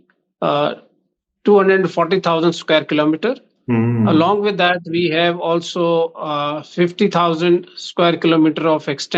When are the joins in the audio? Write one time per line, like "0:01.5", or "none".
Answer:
none